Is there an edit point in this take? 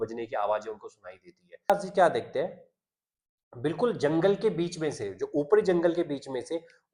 yes; 1 cut; at 1.7 s

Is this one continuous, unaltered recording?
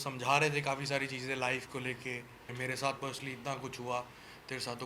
no; 1 cut; at 2.5 s

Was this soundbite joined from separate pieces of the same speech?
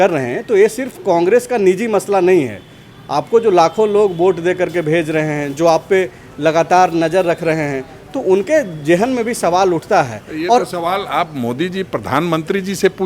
no; 0 cuts

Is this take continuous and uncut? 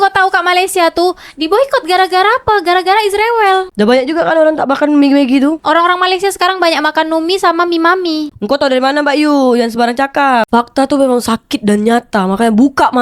no; 1 cut; at 10.5 s

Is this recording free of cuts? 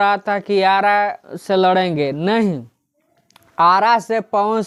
yes; 0 cuts

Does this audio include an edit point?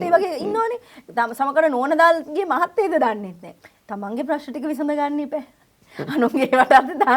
no; 0 cuts

